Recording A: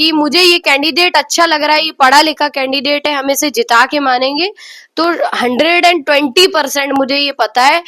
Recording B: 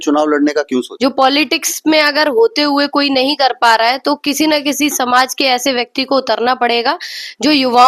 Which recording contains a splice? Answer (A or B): B